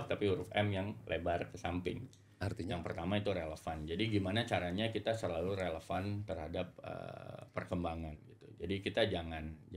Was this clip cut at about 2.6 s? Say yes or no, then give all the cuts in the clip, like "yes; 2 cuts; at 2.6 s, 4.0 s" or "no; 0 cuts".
yes; 1 cut; at 2.6 s